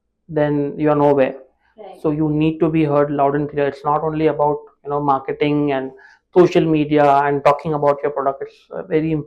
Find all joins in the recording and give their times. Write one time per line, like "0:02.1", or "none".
none